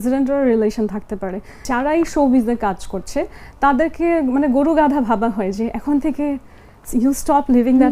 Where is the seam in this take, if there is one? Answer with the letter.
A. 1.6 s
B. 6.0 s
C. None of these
A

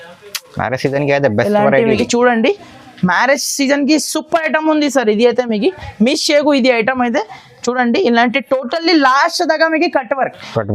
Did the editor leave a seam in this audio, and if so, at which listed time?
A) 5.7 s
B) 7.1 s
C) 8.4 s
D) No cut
D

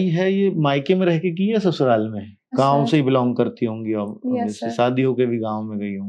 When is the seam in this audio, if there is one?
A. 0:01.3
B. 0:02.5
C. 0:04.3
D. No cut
B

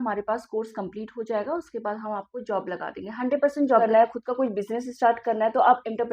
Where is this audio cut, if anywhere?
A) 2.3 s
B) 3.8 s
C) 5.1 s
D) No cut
B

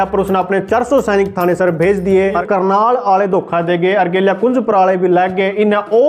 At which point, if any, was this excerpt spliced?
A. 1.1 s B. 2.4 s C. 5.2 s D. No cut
B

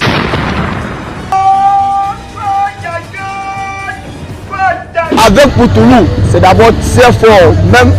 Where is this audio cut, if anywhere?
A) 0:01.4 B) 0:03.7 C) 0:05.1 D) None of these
C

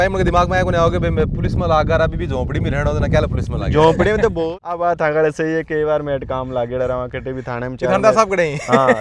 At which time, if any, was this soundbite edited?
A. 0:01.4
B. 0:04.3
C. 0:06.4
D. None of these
B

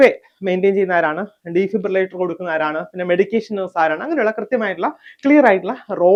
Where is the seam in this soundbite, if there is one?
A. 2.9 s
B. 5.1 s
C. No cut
C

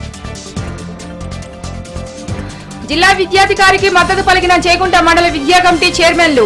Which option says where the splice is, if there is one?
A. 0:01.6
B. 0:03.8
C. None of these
A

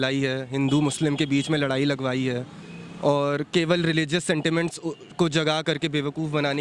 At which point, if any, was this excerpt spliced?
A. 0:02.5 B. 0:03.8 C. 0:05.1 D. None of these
D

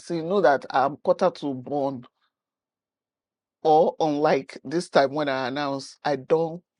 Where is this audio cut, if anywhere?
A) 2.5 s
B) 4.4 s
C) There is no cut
C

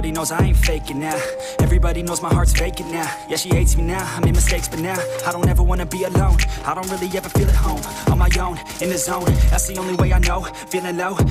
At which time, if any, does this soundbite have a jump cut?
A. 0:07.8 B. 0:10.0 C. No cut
B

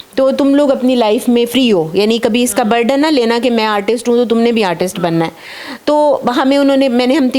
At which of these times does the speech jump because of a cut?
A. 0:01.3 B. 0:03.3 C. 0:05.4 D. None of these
D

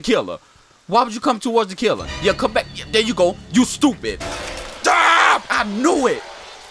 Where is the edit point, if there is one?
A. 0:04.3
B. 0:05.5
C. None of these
A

